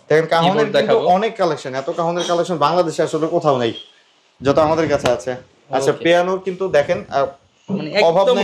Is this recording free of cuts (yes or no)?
yes